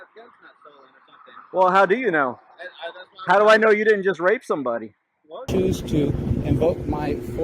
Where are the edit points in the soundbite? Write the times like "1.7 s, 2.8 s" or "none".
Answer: 5.4 s

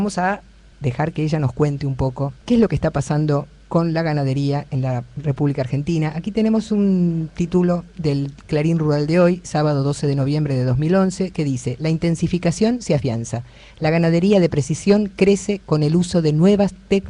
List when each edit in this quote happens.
none

